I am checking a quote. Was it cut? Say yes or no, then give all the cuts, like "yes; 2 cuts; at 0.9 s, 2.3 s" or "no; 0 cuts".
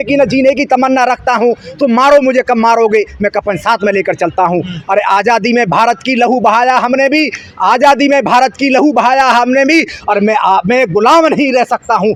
no; 0 cuts